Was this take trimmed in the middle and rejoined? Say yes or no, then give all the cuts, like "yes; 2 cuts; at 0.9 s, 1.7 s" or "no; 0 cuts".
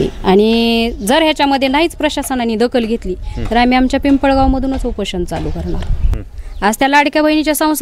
yes; 1 cut; at 6.2 s